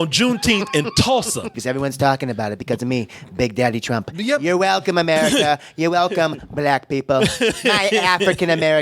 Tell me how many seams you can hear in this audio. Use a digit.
1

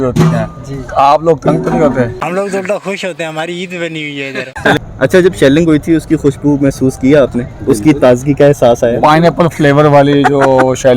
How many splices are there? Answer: 2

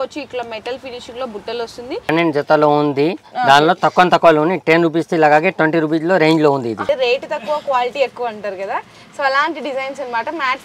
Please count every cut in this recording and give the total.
2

